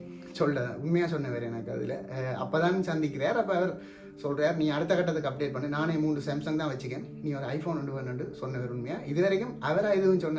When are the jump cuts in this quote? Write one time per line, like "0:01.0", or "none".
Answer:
none